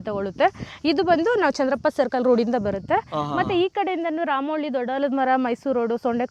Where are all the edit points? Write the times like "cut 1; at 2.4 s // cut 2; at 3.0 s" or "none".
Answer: none

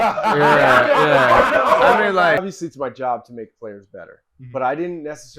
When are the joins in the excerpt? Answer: cut 1; at 2.4 s

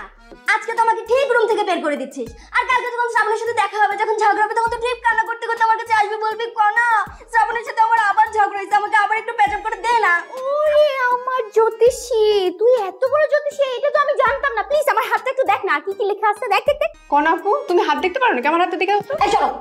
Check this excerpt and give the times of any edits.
cut 1; at 17.0 s

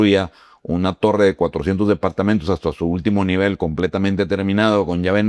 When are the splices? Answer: none

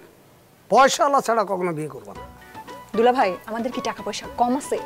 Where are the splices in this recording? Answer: cut 1; at 2.2 s

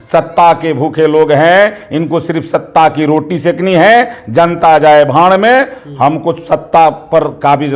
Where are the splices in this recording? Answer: none

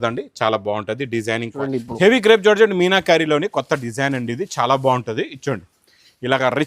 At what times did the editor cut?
cut 1; at 1.6 s

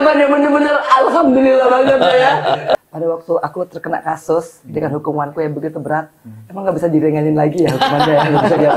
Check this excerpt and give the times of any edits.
cut 1; at 2.8 s

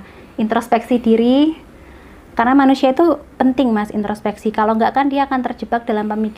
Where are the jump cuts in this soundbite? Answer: none

